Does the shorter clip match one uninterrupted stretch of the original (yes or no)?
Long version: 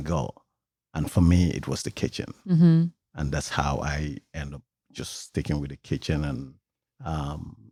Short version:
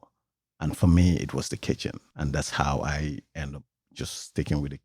no